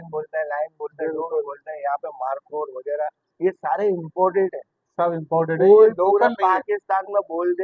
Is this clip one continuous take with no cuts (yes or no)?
yes